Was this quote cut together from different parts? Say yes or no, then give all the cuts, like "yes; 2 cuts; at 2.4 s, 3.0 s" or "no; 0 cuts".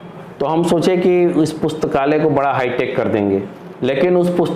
yes; 1 cut; at 3.5 s